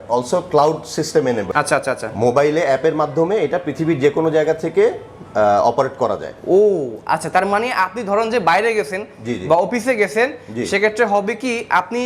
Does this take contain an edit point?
no; 0 cuts

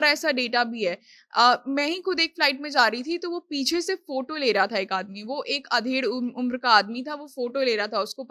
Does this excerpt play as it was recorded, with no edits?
yes; 0 cuts

